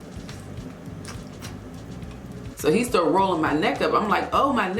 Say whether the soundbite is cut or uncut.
cut